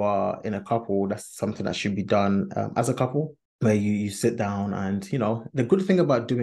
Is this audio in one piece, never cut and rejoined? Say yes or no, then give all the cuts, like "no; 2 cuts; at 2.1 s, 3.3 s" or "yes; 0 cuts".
no; 1 cut; at 3.4 s